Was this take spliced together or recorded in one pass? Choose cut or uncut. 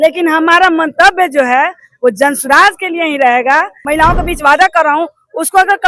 cut